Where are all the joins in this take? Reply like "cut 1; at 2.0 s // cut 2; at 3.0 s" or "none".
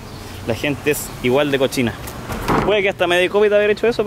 cut 1; at 2.3 s